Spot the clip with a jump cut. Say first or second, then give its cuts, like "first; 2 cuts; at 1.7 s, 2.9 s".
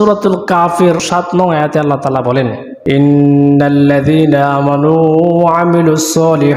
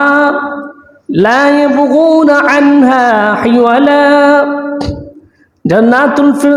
first; 2 cuts; at 1.0 s, 2.7 s